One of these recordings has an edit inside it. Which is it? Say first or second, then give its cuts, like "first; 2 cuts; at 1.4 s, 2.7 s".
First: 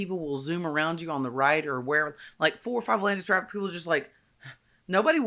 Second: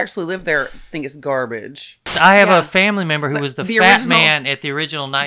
second; 1 cut; at 2.2 s